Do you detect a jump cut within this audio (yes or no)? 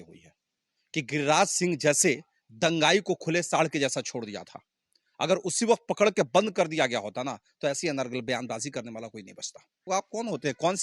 yes